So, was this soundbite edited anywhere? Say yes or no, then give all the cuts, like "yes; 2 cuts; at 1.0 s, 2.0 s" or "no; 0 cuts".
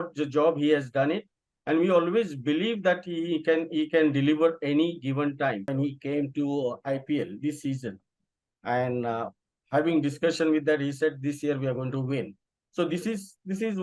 yes; 1 cut; at 5.7 s